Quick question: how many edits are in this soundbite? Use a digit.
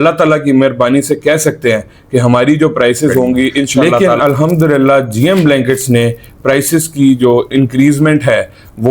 1